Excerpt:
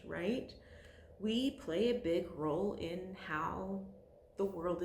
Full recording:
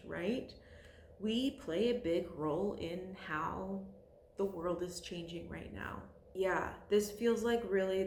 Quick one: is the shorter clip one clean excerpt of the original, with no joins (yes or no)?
yes